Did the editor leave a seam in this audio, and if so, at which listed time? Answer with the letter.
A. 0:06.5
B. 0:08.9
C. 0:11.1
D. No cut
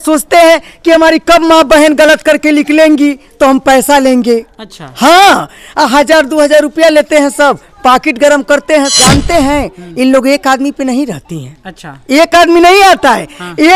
B